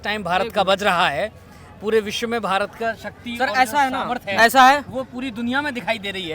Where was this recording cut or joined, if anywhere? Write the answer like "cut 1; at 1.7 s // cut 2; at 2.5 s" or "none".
none